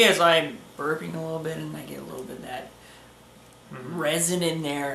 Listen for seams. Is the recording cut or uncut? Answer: uncut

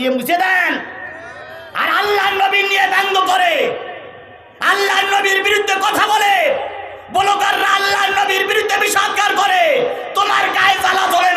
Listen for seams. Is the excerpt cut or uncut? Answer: uncut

